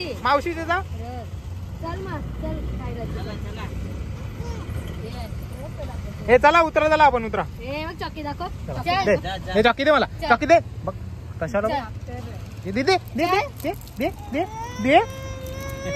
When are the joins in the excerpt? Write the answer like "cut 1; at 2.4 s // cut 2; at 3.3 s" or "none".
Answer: none